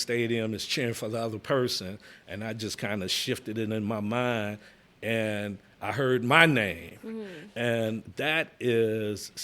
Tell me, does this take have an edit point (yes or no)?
yes